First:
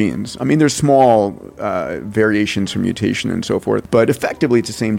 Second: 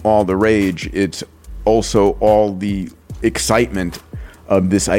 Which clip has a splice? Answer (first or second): first